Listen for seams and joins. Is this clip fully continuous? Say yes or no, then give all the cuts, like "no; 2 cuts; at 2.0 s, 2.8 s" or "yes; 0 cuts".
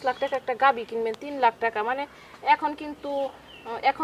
yes; 0 cuts